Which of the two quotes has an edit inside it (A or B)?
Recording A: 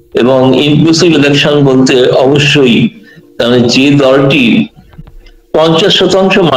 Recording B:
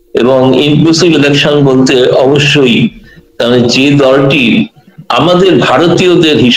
A